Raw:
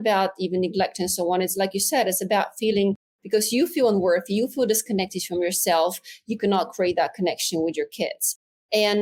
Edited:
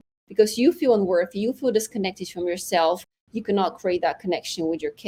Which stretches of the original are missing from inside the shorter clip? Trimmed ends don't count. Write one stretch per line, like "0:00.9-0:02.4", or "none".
none